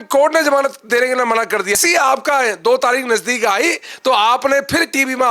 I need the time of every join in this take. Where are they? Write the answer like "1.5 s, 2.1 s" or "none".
1.7 s